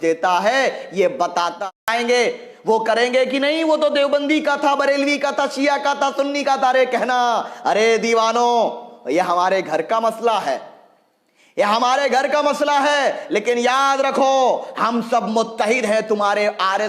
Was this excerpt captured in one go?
no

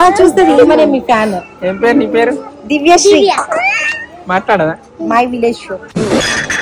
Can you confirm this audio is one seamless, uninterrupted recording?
yes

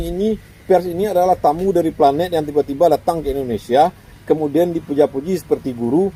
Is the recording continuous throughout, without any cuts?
yes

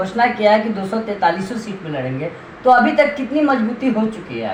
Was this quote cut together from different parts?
no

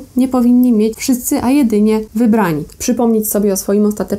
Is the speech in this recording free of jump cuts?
no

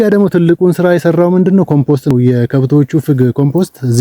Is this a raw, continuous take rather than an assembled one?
no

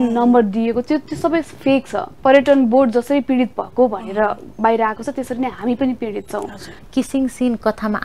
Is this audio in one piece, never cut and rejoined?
no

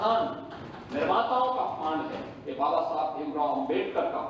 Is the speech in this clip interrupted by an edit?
no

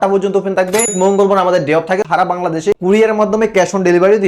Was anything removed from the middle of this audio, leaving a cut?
yes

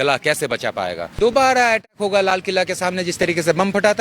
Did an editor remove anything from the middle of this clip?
yes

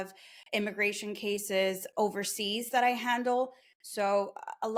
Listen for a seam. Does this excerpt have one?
no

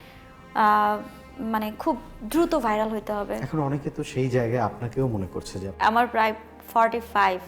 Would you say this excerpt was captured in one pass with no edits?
no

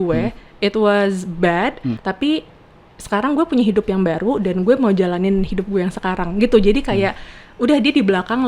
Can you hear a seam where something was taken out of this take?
yes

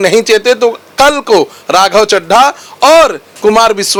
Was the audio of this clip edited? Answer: no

